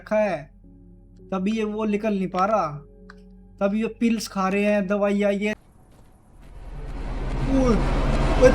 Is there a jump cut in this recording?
yes; 1 cut; at 5.6 s

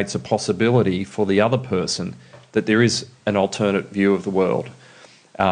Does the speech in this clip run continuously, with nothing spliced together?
yes; 0 cuts

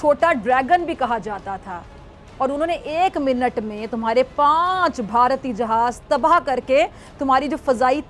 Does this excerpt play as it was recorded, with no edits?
yes; 0 cuts

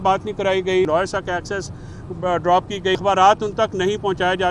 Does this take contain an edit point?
yes; 2 cuts; at 0.9 s, 3.0 s

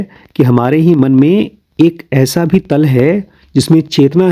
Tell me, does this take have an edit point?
no; 0 cuts

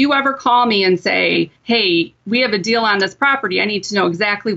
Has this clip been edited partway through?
yes; 1 cut; at 1.6 s

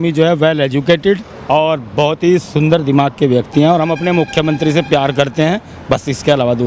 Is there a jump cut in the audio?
no; 0 cuts

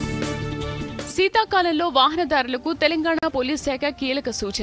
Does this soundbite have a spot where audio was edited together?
no; 0 cuts

